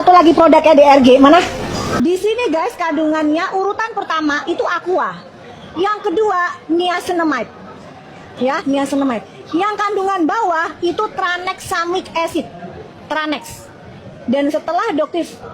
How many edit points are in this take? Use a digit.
1